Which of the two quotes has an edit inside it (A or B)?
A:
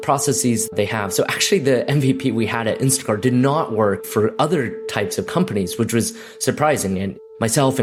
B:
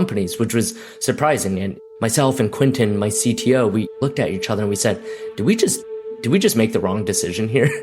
B